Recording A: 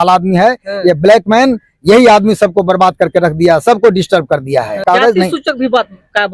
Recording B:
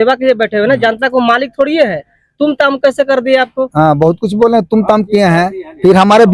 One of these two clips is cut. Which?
A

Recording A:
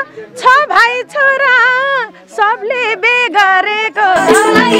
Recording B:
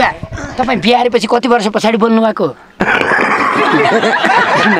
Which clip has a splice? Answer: B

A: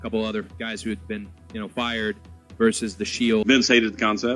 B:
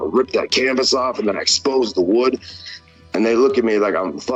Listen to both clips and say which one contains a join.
A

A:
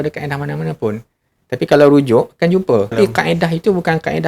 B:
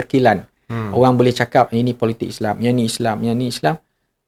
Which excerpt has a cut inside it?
A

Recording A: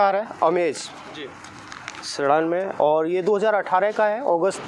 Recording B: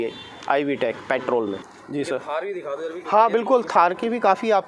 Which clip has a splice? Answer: B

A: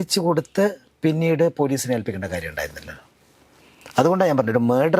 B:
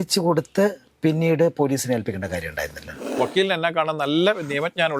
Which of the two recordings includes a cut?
B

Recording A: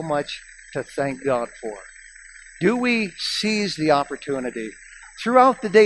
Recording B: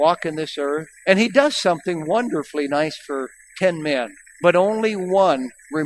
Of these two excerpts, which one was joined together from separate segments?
B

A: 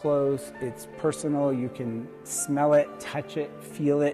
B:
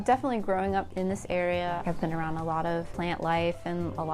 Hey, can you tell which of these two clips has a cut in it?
B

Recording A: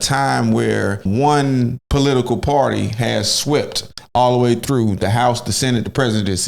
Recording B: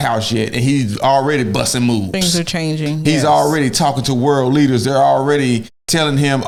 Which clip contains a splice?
A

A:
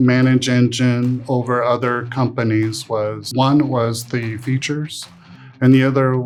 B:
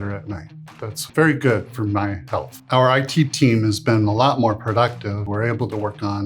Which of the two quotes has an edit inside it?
B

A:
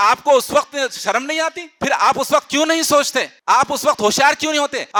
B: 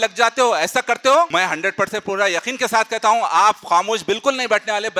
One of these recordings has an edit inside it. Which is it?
B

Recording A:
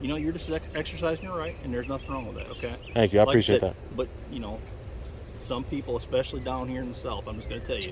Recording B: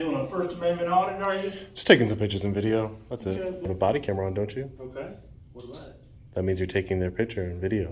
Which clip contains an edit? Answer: B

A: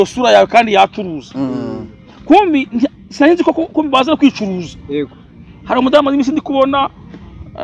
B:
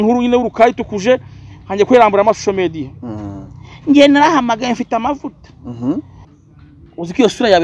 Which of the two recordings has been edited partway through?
B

